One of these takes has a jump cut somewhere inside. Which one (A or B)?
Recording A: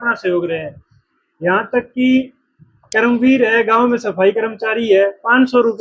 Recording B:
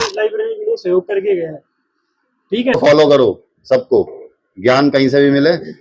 B